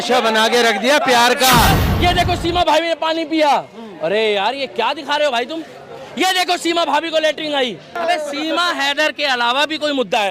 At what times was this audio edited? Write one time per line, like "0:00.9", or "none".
0:01.7
0:08.0